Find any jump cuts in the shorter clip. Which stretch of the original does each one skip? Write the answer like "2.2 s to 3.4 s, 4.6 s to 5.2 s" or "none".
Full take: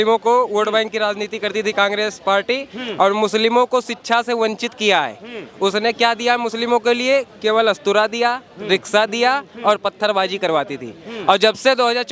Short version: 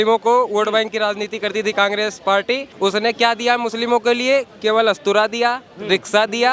2.7 s to 5.5 s